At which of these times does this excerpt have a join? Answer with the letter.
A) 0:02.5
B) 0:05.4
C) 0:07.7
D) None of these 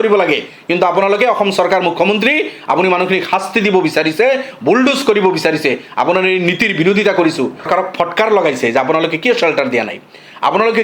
C